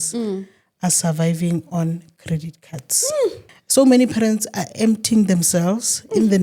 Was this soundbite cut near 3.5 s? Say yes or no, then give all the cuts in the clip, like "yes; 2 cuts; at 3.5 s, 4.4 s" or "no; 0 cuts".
yes; 1 cut; at 3.5 s